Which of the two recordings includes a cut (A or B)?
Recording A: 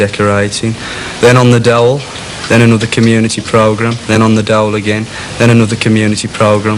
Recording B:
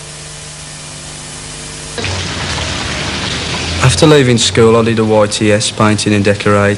A